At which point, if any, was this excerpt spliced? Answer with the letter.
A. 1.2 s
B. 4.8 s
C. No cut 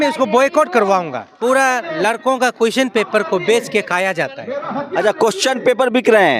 A